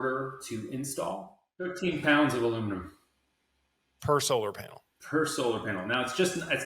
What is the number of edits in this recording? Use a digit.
1